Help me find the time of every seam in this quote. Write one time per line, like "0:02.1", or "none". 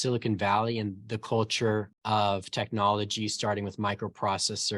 0:01.9